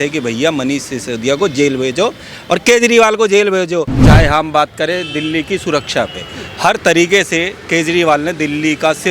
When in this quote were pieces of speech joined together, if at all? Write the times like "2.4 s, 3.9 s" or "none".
4.0 s